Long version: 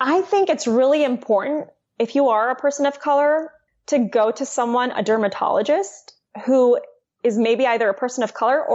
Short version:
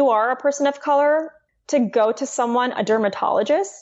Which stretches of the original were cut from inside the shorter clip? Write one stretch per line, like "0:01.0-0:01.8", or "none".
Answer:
none